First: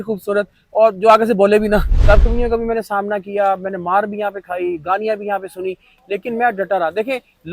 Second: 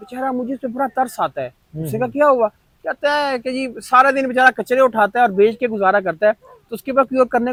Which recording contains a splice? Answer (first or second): first